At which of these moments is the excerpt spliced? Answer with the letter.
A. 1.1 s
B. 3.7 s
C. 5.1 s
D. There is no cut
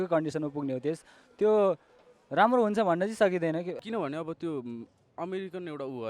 B